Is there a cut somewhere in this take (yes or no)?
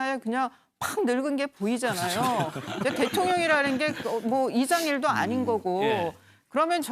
yes